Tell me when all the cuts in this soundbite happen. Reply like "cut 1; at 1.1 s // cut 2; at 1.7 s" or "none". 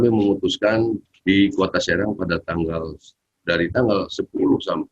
cut 1; at 1.1 s